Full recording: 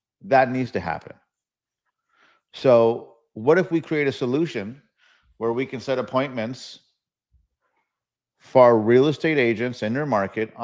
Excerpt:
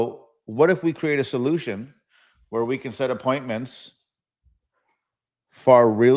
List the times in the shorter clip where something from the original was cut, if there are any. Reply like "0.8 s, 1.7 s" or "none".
none